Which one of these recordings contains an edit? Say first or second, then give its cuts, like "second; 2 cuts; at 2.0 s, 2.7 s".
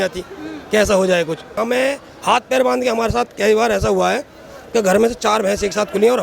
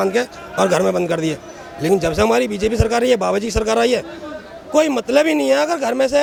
first; 1 cut; at 1.6 s